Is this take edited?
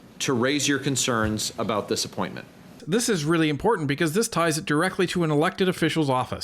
yes; 1 cut; at 2.8 s

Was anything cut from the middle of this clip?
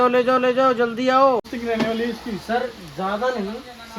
yes; 1 cut; at 1.5 s

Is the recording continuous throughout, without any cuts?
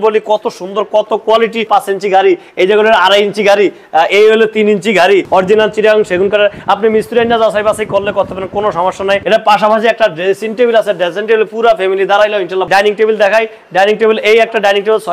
no; 4 cuts; at 1.6 s, 5.3 s, 9.2 s, 12.7 s

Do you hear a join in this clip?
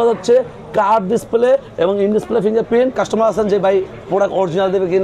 yes; 1 cut; at 2.9 s

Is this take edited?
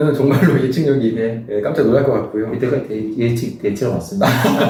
no; 0 cuts

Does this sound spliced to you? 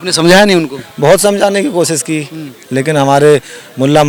no; 0 cuts

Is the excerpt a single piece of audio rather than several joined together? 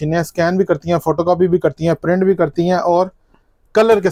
yes; 0 cuts

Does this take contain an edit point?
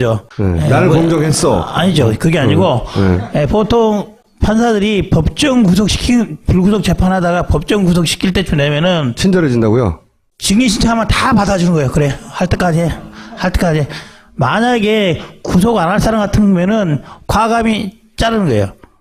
no; 0 cuts

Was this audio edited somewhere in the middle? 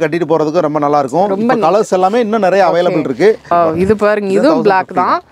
yes; 1 cut; at 3.5 s

